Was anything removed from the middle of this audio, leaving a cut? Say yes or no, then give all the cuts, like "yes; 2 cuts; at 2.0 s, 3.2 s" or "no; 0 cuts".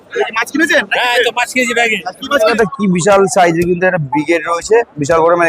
yes; 1 cut; at 2.5 s